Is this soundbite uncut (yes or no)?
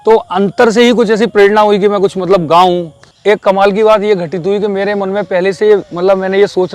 no